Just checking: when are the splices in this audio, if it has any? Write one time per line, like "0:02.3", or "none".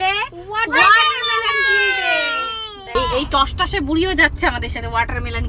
none